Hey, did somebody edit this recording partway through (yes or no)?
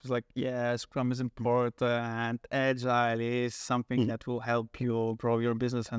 no